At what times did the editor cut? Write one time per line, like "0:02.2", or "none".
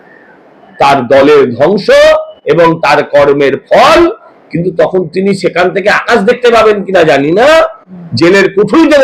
none